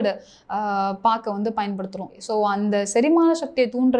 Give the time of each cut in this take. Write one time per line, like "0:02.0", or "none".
0:02.1